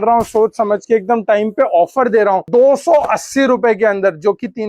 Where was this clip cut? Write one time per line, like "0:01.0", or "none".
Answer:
0:02.5